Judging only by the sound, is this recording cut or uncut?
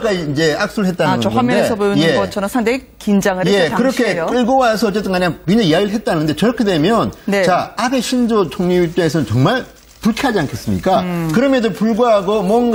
uncut